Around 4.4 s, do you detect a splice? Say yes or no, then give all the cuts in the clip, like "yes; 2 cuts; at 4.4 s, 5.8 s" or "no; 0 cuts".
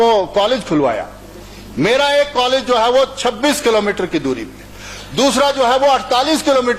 no; 0 cuts